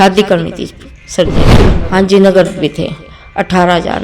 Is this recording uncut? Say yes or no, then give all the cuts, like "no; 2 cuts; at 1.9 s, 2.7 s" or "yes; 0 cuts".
no; 1 cut; at 1.7 s